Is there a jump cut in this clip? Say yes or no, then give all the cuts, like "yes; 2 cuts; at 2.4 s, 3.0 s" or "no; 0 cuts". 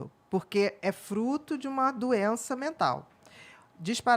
no; 0 cuts